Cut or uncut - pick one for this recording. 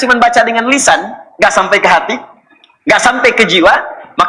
uncut